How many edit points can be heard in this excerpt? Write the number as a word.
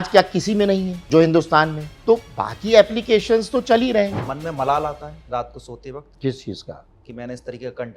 four